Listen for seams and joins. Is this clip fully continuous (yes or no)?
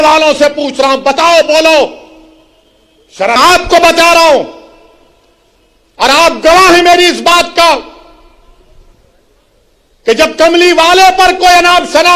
no